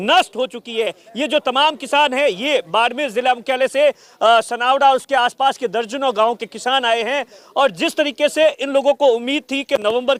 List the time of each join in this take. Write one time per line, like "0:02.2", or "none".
none